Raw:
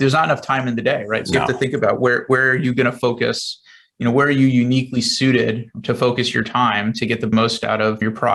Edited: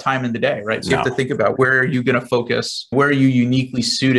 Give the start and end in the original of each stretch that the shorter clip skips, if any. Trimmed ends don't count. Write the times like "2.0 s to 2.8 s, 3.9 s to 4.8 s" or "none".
2.0 s to 2.2 s, 3.6 s to 4.1 s